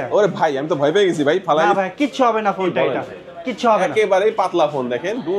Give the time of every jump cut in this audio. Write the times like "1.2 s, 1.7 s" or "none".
none